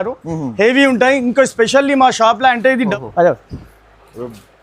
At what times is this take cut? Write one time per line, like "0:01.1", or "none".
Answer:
0:02.9

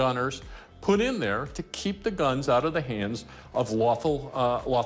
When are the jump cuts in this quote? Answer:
none

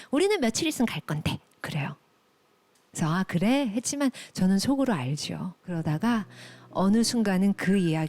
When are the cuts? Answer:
0:05.6

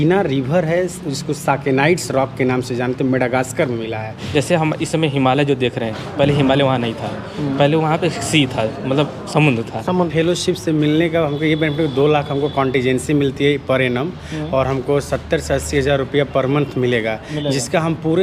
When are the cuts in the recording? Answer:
0:04.2
0:10.1

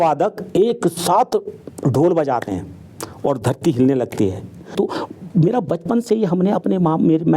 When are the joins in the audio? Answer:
0:04.7

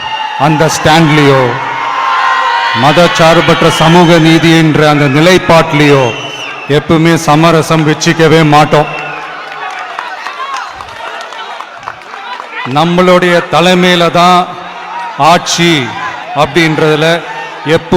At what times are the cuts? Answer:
none

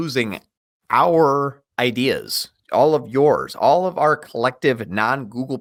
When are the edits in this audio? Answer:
none

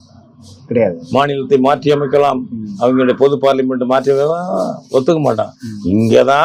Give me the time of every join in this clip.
none

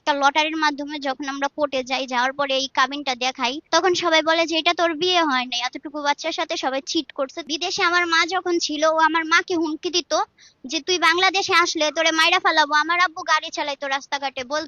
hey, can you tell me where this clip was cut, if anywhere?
0:03.6
0:07.4

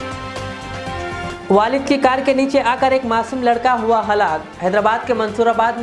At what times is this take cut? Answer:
0:01.1

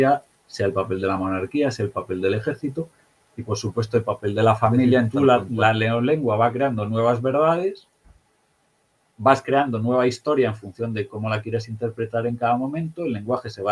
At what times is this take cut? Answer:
0:05.1

